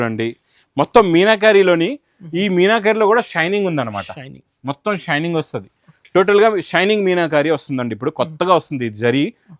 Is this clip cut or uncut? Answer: uncut